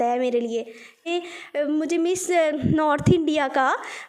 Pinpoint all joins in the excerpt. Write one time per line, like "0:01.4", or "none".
0:01.1